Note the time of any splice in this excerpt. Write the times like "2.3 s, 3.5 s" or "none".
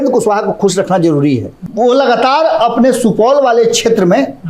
1.6 s